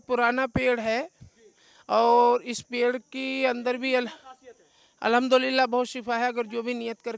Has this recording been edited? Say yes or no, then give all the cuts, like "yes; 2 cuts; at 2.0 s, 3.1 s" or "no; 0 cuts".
no; 0 cuts